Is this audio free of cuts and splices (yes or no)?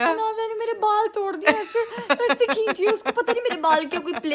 yes